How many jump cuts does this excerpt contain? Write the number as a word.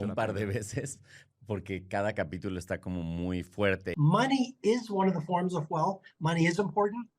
one